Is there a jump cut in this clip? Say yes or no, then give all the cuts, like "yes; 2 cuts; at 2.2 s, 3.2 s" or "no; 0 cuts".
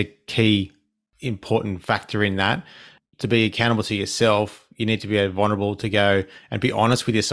no; 0 cuts